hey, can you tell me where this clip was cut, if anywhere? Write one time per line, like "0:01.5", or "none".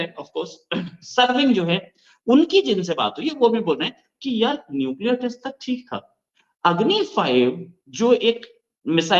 none